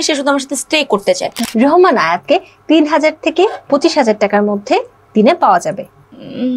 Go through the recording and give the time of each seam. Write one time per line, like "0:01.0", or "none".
0:01.4